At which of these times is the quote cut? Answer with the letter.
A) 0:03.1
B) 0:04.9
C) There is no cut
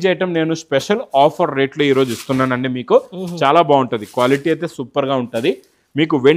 C